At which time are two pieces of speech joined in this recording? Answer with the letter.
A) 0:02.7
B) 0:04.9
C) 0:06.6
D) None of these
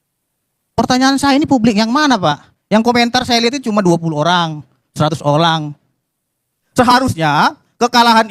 C